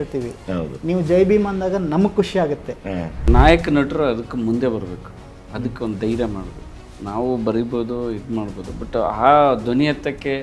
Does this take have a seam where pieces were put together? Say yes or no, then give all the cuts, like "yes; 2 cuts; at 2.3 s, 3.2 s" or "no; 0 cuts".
yes; 1 cut; at 3.3 s